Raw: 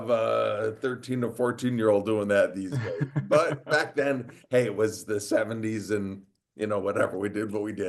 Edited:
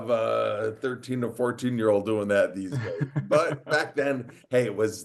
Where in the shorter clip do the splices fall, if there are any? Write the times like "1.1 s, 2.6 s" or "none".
none